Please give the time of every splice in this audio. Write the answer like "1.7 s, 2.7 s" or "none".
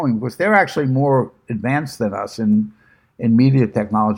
none